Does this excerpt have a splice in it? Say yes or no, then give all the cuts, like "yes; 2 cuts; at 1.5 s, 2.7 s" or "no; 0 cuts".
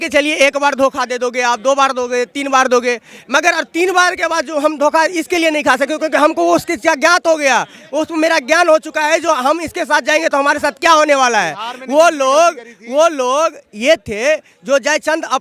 no; 0 cuts